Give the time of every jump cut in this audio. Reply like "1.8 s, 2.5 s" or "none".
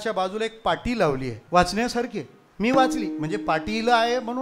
1.4 s